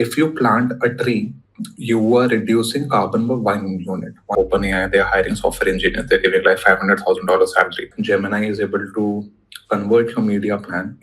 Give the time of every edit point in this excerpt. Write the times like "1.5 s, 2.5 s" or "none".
4.3 s, 7.9 s